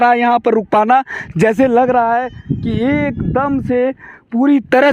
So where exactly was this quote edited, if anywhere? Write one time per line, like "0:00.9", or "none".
none